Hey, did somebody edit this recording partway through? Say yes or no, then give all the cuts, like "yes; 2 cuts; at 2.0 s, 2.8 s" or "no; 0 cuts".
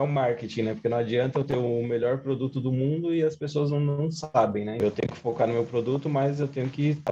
yes; 1 cut; at 4.8 s